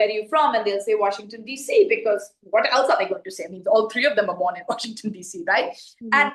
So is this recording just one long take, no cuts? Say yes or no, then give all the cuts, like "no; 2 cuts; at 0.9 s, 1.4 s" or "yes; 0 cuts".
yes; 0 cuts